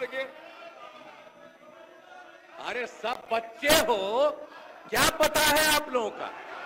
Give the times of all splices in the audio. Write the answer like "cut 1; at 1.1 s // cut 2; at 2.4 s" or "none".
none